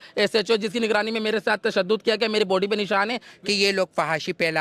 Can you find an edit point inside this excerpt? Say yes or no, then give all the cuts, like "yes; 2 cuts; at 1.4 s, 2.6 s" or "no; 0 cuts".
yes; 1 cut; at 3.3 s